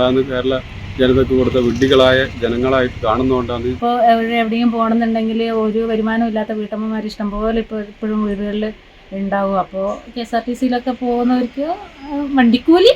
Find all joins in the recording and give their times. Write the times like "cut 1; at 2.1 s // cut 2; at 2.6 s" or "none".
cut 1; at 3.7 s

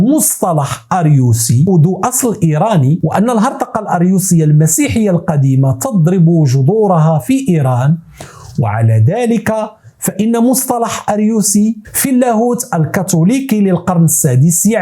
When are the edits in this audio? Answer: cut 1; at 1.7 s

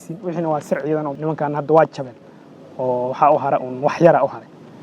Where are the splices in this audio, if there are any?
cut 1; at 1.1 s

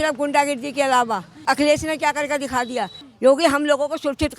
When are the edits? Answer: cut 1; at 1.4 s // cut 2; at 3.0 s

